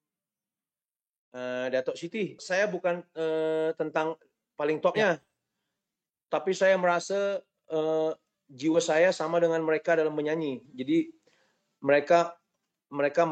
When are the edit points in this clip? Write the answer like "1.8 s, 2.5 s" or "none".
2.4 s

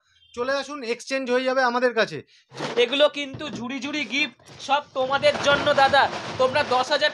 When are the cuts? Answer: 2.6 s

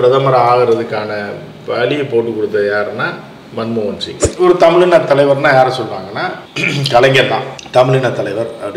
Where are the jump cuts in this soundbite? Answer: 4.2 s

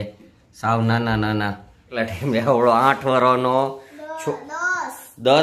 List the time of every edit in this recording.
1.9 s

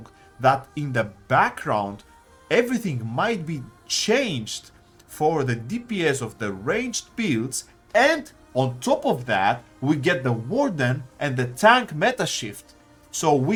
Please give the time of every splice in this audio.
none

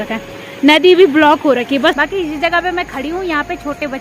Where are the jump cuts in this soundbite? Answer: 2.0 s

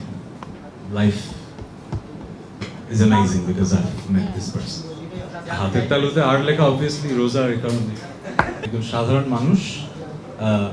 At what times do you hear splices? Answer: 5.4 s, 8.6 s

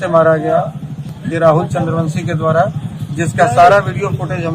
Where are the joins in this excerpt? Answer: 1.1 s

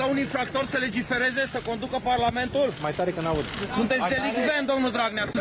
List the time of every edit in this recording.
4.3 s

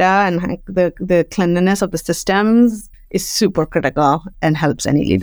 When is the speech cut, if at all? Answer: 2.9 s, 4.3 s

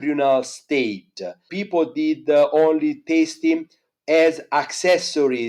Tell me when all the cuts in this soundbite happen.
none

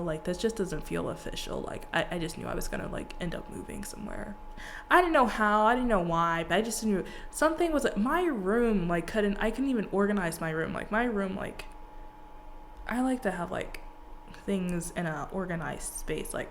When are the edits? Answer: none

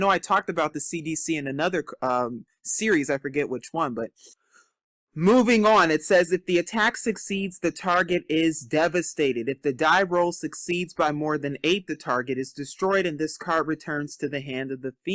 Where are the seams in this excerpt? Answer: 13.0 s

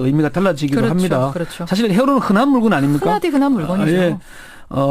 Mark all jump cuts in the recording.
2.8 s

